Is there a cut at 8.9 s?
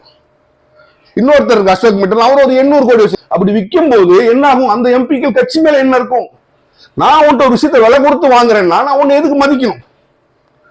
no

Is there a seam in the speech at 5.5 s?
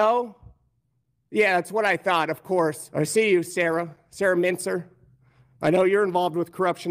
no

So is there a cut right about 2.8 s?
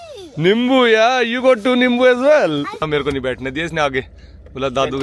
yes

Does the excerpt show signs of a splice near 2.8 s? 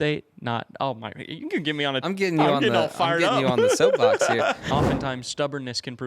no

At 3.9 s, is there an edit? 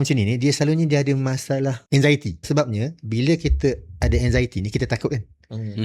no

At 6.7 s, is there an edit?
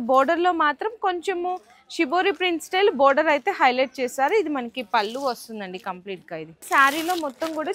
yes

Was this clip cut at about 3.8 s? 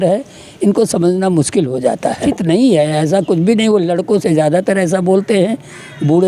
no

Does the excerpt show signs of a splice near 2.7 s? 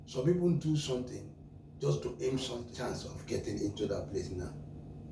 yes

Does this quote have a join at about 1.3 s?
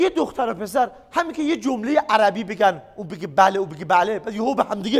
no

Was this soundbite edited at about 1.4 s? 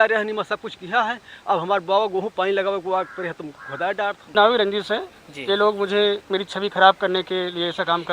no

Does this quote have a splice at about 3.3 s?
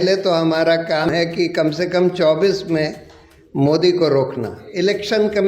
no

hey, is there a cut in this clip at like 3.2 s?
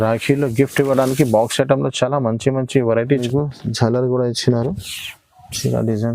yes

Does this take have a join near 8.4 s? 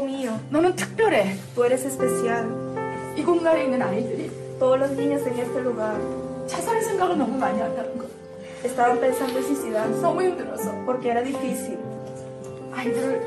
no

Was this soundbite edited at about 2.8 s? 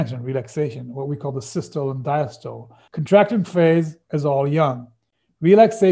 yes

